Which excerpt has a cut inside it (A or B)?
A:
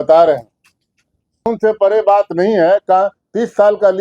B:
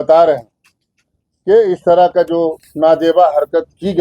A